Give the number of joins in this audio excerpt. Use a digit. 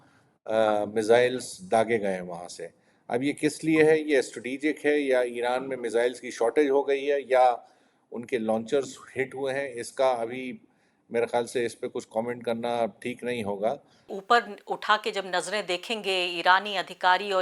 1